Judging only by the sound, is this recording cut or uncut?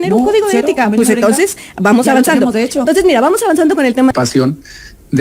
cut